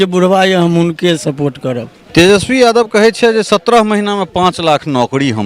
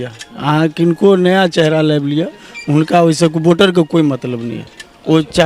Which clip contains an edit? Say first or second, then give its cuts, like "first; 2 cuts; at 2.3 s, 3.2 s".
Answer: first; 1 cut; at 1.9 s